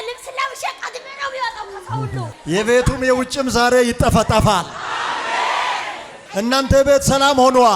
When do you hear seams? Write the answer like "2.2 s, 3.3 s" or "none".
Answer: 2.3 s